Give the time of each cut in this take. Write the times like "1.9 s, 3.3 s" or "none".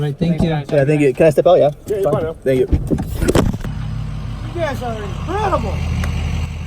3.7 s